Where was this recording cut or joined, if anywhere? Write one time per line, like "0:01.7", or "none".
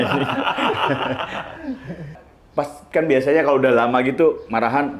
0:02.1

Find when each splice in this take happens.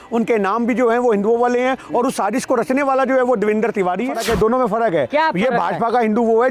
0:04.2

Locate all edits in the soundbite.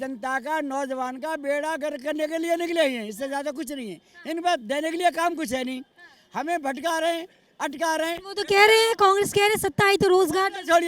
none

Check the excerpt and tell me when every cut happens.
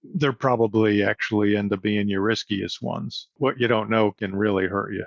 0:03.4
0:04.2

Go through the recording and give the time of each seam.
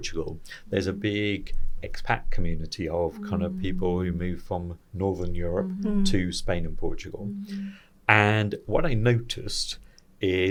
none

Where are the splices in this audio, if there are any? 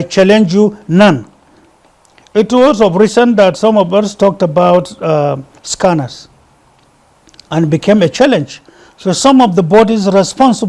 none

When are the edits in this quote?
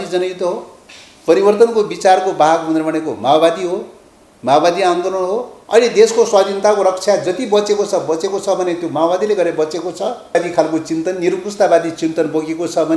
0:05.5
0:10.3

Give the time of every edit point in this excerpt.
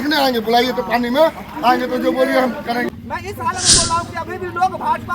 0:02.9

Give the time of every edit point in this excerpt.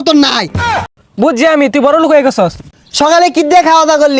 0:00.9
0:02.6

